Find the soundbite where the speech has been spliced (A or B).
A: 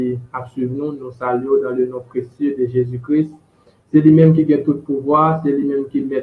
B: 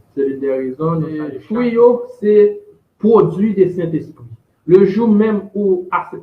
B